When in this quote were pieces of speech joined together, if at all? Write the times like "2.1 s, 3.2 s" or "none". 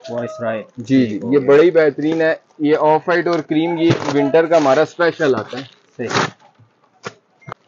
none